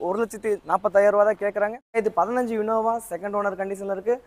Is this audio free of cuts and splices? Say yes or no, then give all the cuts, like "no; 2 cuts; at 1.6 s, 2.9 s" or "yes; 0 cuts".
no; 1 cut; at 2.0 s